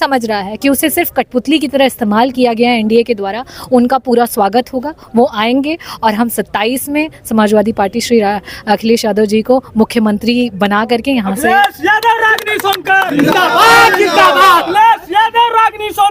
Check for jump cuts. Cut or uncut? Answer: uncut